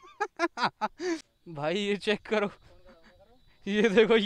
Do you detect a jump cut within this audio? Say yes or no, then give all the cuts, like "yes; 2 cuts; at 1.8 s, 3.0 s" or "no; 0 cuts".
yes; 1 cut; at 1.4 s